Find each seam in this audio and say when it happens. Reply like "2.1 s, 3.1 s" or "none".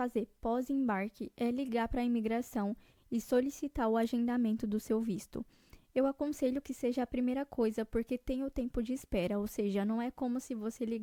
none